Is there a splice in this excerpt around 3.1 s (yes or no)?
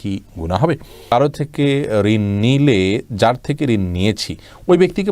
no